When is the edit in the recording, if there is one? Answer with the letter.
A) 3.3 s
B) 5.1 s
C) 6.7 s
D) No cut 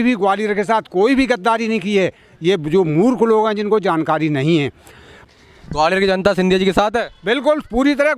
B